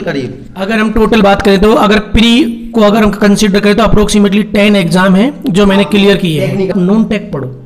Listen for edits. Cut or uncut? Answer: cut